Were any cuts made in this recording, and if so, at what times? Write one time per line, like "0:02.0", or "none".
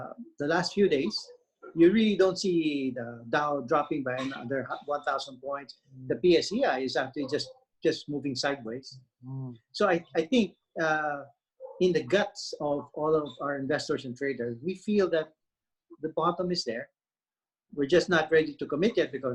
none